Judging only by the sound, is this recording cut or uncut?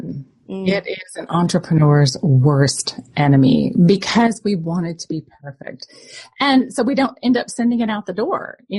uncut